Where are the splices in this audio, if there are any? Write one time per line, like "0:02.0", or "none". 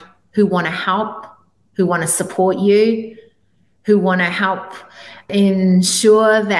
0:05.3